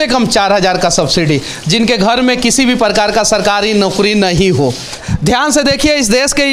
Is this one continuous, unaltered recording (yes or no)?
yes